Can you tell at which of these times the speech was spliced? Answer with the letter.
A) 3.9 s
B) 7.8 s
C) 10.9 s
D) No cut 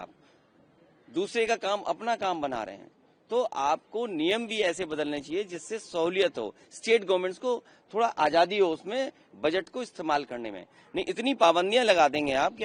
D